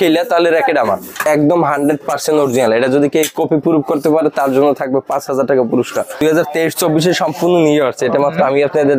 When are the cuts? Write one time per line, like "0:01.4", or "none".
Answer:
0:01.3
0:06.2